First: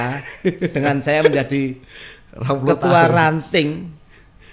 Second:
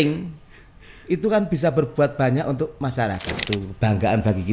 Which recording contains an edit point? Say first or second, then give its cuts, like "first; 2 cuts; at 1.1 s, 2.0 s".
second; 1 cut; at 3.4 s